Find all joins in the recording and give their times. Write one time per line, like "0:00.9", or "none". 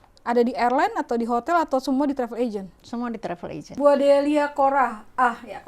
0:03.7